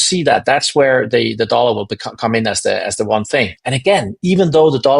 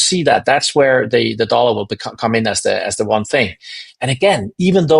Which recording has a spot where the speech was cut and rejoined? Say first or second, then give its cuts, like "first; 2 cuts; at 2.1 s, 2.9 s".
first; 1 cut; at 3.6 s